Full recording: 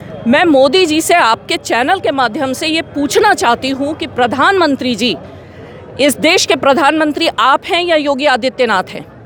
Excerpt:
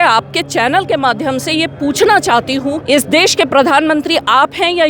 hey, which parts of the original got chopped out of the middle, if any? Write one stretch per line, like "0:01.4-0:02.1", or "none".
0:03.9-0:05.9